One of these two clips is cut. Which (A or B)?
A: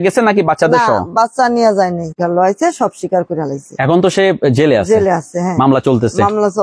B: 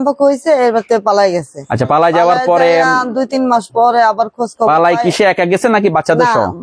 A